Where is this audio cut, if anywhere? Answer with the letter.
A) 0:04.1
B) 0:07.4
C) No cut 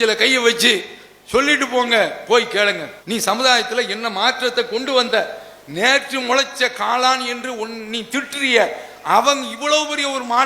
C